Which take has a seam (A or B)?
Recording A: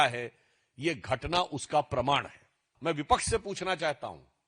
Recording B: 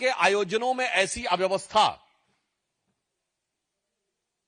A